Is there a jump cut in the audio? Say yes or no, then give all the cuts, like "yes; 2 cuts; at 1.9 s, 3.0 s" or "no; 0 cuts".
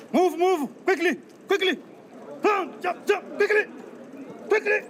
no; 0 cuts